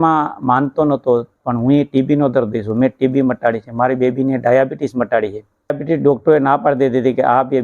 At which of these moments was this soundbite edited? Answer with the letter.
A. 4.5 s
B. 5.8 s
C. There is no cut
B